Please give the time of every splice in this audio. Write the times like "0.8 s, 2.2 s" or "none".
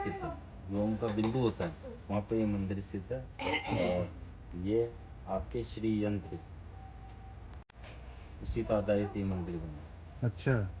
none

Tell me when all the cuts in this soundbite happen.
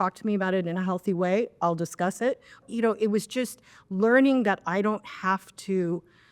2.6 s

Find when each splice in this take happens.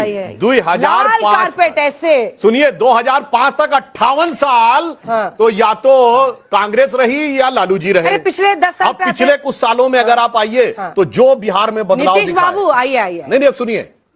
none

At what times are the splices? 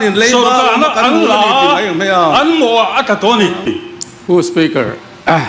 3.8 s

